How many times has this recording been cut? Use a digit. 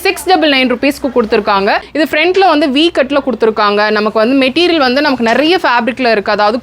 1